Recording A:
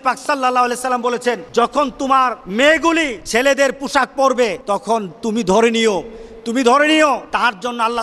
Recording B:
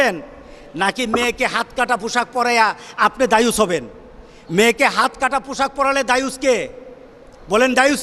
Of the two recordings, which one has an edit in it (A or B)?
A